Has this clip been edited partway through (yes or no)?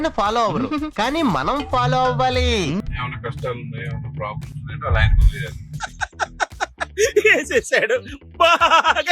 yes